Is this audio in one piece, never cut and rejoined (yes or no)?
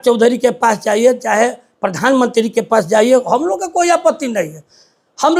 yes